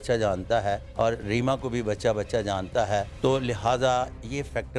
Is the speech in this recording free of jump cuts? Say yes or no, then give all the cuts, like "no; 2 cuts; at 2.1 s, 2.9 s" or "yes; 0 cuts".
no; 2 cuts; at 0.9 s, 3.1 s